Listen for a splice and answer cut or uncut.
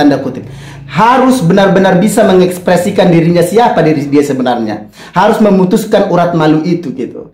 uncut